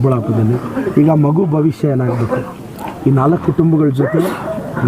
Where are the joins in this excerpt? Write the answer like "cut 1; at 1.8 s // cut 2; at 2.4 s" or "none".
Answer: cut 1; at 2.9 s